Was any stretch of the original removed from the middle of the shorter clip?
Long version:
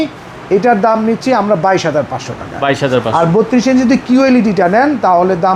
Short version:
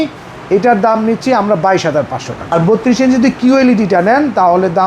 yes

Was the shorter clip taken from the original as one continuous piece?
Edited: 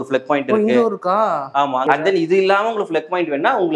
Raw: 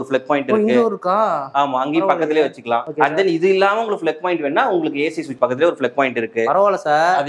no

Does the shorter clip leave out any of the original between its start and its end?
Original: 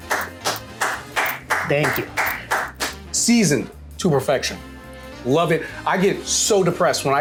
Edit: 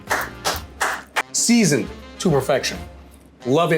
yes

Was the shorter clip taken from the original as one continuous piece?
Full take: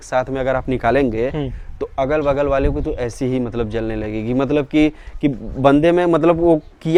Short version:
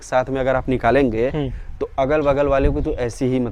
yes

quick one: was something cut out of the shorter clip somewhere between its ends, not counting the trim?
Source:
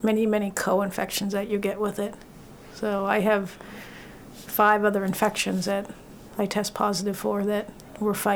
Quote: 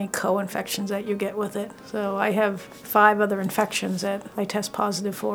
yes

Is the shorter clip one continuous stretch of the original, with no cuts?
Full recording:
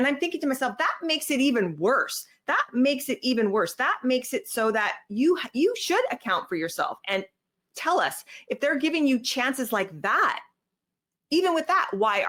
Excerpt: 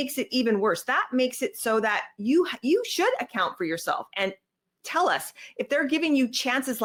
yes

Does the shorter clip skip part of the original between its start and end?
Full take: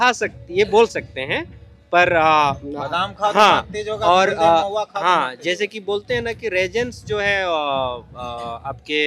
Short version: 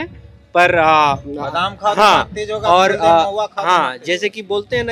no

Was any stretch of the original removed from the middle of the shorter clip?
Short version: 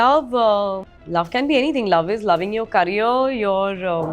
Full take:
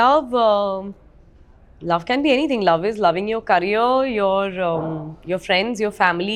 yes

